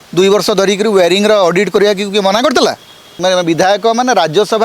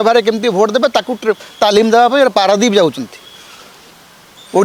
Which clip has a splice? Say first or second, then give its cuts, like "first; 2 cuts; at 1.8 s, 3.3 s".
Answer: first; 1 cut; at 3.2 s